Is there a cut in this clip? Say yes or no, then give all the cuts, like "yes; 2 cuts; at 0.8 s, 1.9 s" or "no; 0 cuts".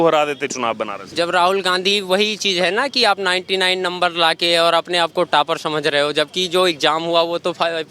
yes; 1 cut; at 1.0 s